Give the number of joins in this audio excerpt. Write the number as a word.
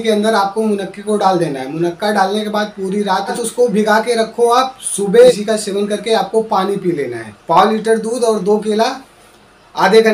three